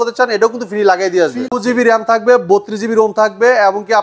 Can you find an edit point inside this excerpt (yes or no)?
yes